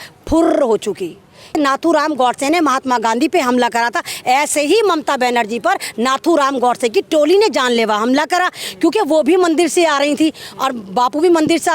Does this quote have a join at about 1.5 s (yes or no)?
yes